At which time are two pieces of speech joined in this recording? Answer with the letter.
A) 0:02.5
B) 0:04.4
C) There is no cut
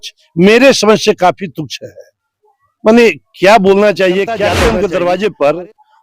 B